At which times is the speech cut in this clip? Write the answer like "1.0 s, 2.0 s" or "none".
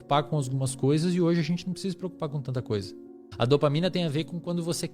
3.1 s